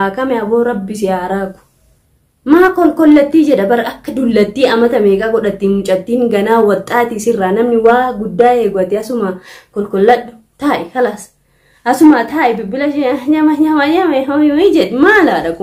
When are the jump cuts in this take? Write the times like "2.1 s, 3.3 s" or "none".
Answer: none